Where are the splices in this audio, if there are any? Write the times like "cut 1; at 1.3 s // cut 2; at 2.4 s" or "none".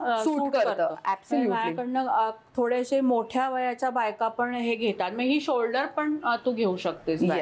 none